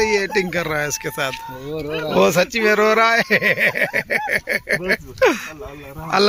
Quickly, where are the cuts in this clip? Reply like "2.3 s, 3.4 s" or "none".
none

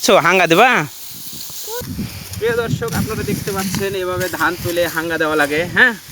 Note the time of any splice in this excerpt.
1.8 s

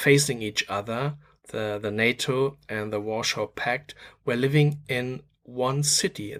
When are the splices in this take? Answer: none

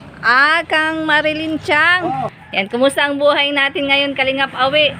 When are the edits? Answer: 2.4 s

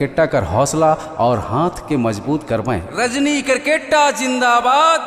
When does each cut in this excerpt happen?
2.9 s

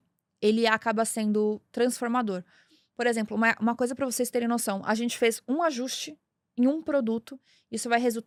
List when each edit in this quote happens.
none

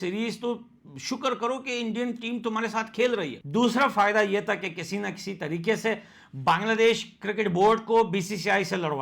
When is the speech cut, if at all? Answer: 3.4 s

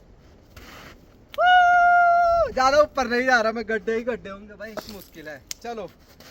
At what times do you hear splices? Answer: 4.8 s

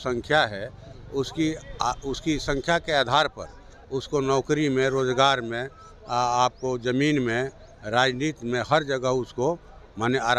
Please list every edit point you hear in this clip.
none

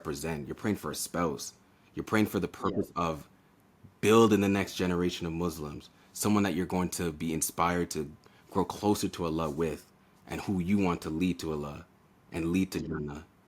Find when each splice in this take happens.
none

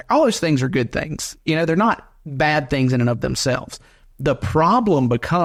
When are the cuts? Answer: none

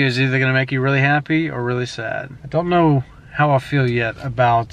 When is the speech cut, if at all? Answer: 2.3 s

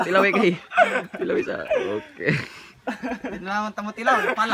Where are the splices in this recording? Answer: none

